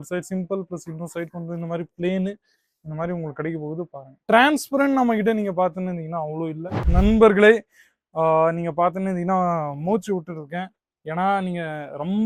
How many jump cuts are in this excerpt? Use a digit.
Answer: 1